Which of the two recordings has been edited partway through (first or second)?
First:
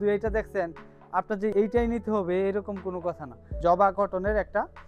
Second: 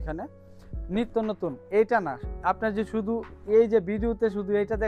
first